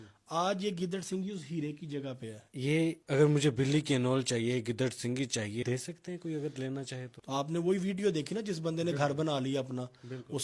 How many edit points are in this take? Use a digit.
3